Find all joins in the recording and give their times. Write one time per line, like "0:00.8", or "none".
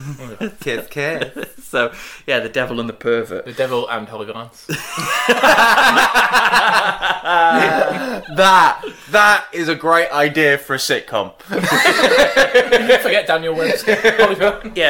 none